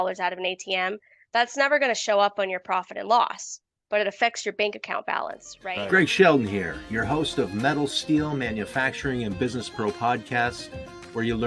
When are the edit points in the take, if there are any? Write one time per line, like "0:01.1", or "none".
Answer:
0:05.5